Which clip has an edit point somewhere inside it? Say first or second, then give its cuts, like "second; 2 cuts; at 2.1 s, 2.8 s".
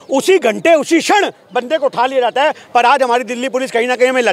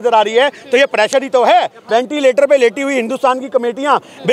second; 1 cut; at 1.8 s